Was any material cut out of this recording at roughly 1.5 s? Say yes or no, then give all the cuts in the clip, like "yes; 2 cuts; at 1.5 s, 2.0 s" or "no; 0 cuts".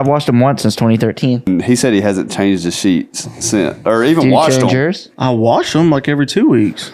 yes; 1 cut; at 1.5 s